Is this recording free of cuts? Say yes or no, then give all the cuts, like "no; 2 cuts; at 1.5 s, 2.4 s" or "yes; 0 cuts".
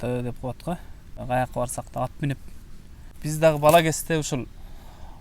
no; 2 cuts; at 1.2 s, 3.0 s